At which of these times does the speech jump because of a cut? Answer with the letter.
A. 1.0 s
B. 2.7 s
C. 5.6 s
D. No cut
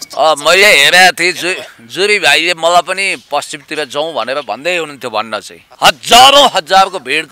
C